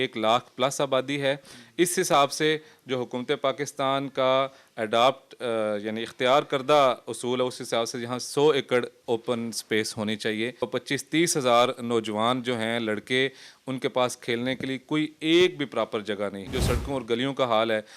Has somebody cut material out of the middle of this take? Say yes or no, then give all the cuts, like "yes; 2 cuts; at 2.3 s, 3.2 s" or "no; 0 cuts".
yes; 2 cuts; at 10.7 s, 16.5 s